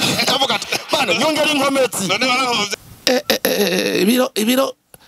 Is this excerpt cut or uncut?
cut